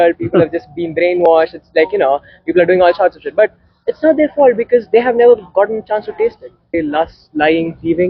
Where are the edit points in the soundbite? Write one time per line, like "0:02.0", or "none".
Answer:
0:06.7